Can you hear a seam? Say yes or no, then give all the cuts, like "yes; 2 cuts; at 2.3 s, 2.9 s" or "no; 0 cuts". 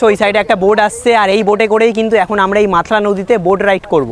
no; 0 cuts